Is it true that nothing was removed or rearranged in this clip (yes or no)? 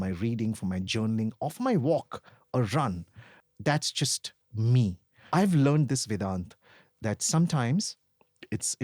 no